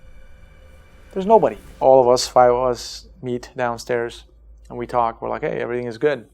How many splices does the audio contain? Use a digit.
1